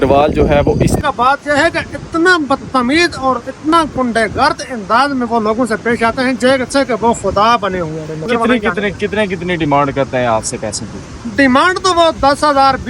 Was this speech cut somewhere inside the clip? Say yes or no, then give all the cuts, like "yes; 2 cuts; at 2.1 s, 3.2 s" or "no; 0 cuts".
yes; 2 cuts; at 1.0 s, 8.2 s